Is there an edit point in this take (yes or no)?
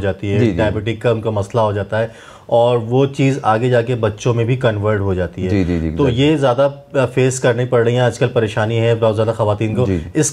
no